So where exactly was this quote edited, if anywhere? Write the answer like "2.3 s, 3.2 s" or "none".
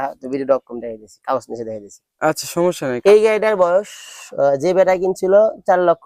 3.0 s